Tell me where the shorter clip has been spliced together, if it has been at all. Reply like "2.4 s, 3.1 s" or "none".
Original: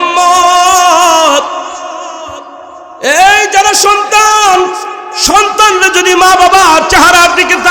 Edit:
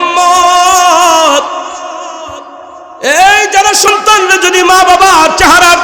3.9 s